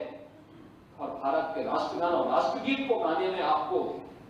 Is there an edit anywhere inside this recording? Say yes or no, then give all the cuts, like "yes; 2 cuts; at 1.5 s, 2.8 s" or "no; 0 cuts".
no; 0 cuts